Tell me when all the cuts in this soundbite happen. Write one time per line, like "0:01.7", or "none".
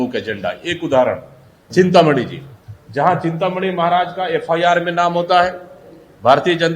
0:01.5